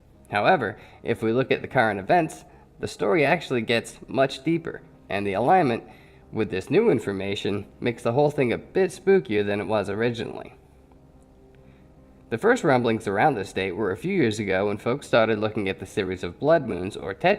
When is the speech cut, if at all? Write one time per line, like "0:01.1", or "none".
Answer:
0:15.9